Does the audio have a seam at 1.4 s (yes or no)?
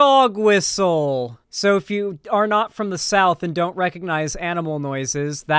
yes